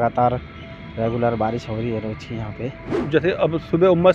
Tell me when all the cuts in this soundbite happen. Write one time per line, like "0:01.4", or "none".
0:02.9